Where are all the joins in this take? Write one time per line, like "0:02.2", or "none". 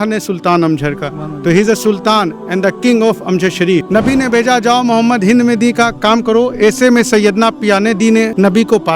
0:03.8